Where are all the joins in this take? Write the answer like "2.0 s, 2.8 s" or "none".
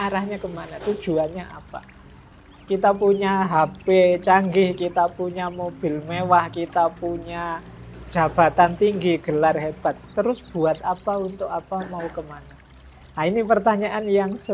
none

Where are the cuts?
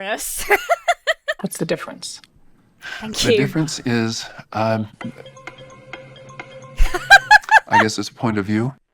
1.4 s

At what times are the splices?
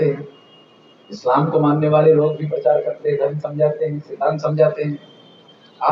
none

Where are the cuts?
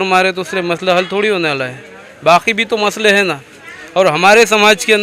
none

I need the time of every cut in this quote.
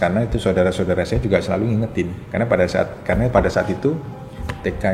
2.2 s

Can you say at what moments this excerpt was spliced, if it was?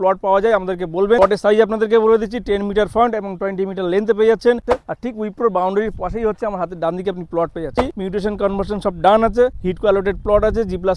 1.2 s, 4.6 s, 7.8 s

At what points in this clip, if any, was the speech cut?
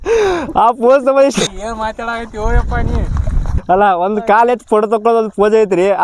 1.5 s, 3.5 s

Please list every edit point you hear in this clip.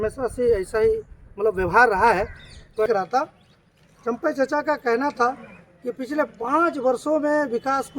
2.9 s

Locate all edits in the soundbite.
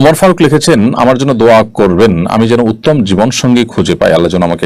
none

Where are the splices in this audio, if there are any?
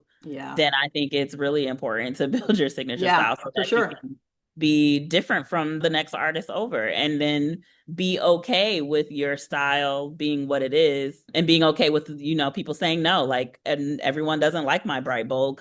5.8 s, 11.2 s

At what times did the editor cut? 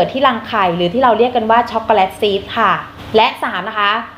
2.9 s

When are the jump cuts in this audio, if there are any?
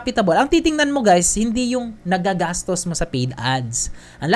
none

